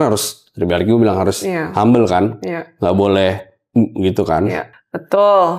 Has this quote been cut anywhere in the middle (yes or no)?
no